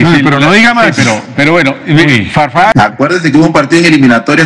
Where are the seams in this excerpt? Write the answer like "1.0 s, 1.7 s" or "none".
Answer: 2.7 s